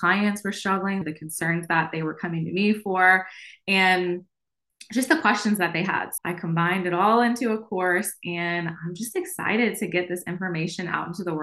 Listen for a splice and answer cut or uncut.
cut